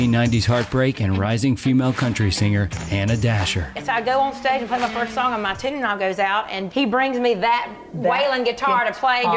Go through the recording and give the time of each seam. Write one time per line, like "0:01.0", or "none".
0:03.8